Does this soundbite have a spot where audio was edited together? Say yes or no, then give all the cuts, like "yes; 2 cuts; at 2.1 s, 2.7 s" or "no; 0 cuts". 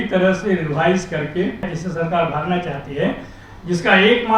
yes; 1 cut; at 1.7 s